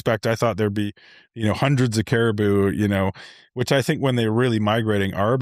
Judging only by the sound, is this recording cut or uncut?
uncut